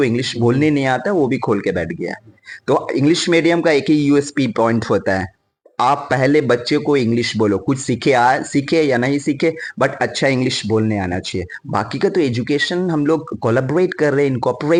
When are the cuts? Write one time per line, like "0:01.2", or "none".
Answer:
none